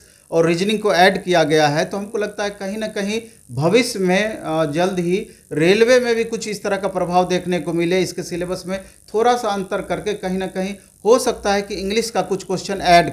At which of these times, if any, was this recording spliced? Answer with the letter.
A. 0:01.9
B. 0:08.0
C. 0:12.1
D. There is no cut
D